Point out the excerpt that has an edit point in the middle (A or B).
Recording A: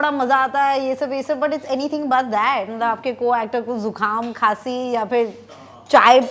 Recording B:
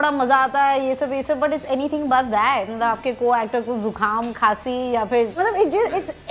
B